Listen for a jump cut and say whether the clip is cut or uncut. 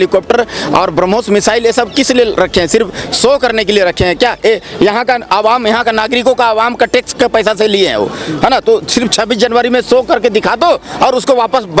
uncut